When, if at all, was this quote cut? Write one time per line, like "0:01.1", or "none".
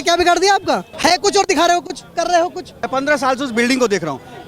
0:00.9
0:02.7